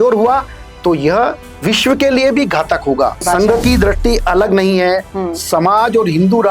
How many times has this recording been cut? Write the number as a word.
one